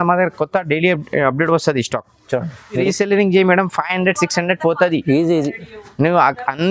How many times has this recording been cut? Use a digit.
1